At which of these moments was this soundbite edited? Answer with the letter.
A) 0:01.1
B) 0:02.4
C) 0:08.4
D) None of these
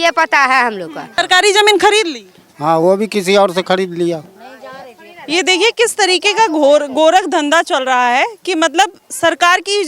A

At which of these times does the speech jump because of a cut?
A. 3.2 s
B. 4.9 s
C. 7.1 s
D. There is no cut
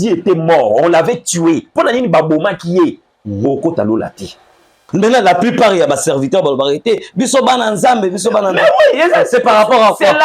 B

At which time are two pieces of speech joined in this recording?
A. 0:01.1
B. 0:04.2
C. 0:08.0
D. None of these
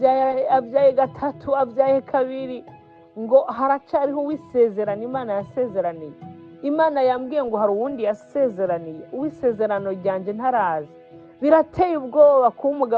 D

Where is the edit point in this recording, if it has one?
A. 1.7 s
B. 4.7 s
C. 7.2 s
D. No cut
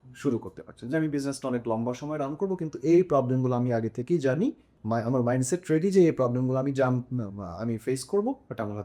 B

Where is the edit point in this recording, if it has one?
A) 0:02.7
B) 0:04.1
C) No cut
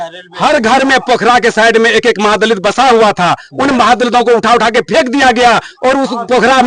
C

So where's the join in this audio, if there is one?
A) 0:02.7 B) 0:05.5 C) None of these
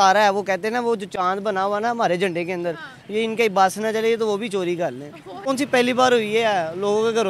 B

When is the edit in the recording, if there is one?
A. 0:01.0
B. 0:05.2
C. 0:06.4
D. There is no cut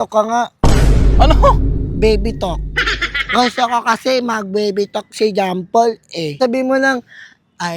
C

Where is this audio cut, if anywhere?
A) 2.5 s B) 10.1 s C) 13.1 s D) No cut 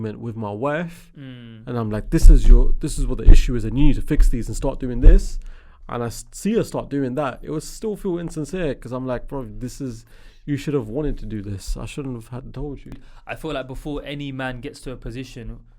C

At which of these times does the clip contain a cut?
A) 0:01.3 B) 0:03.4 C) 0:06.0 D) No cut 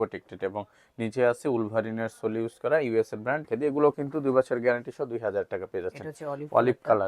B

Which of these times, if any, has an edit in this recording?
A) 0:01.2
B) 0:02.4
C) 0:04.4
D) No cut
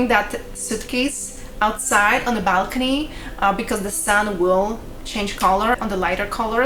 D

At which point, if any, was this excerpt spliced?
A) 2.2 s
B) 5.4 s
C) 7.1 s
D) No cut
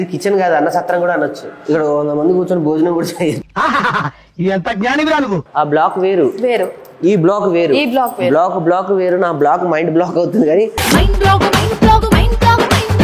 B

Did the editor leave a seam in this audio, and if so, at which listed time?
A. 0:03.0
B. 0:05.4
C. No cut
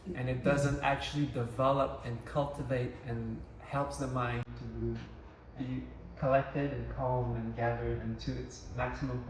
B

